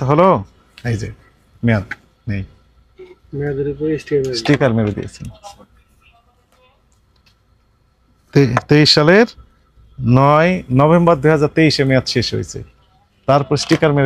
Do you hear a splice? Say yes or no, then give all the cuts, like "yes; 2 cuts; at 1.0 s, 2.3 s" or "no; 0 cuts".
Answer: no; 0 cuts